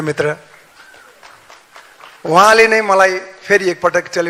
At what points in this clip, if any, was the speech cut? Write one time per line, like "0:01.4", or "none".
none